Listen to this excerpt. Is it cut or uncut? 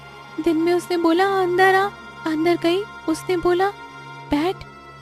cut